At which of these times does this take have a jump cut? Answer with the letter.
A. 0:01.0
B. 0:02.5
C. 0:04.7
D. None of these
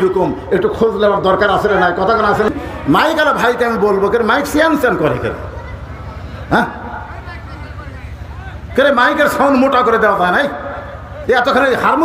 B